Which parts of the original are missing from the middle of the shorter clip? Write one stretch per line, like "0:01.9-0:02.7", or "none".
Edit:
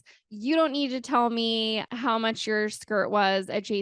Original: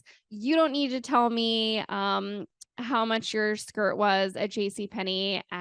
0:01.9-0:02.7